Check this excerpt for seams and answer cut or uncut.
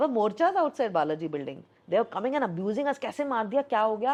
uncut